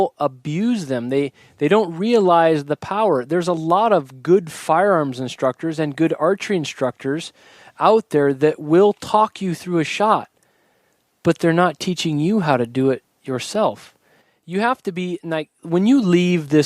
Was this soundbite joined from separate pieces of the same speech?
no; 0 cuts

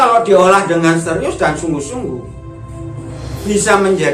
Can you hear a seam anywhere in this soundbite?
no; 0 cuts

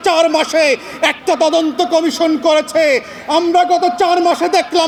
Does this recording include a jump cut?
no; 0 cuts

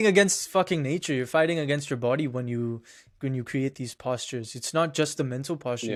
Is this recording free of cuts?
yes; 0 cuts

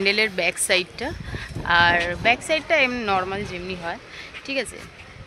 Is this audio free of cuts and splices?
yes; 0 cuts

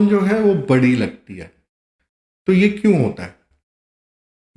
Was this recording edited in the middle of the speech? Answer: no; 0 cuts

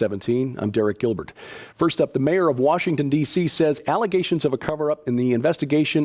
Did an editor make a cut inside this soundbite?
yes; 1 cut; at 4.3 s

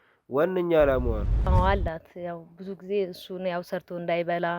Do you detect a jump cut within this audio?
yes; 1 cut; at 1.5 s

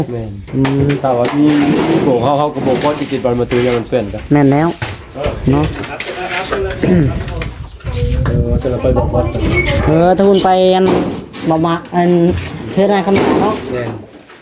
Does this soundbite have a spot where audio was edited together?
no; 0 cuts

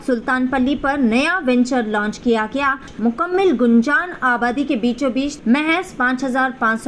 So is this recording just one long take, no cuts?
no; 2 cuts; at 2.9 s, 5.3 s

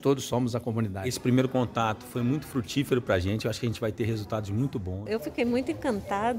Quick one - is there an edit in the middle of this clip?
yes; 2 cuts; at 1.2 s, 4.9 s

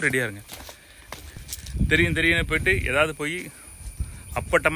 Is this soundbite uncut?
yes; 0 cuts

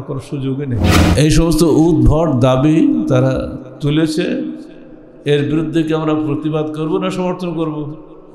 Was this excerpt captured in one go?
no; 1 cut; at 0.9 s

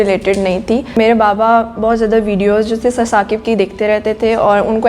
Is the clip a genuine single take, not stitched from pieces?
no; 1 cut; at 1.0 s

